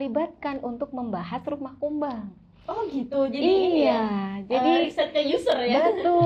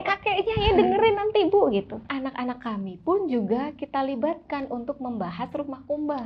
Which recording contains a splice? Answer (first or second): second